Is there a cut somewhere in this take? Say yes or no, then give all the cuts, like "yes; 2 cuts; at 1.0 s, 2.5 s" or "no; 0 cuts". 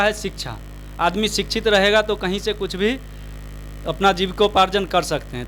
no; 0 cuts